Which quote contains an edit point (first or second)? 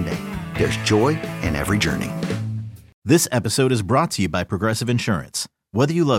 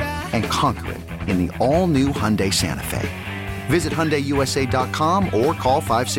first